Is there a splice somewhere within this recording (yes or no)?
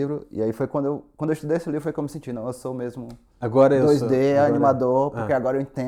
no